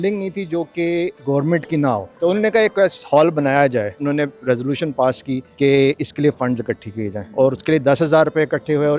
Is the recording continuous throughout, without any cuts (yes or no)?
no